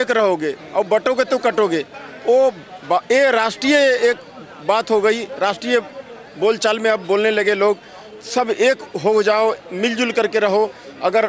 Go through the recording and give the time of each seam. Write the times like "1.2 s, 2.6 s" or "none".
none